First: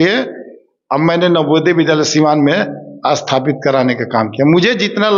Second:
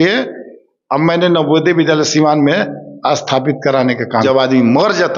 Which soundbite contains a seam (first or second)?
second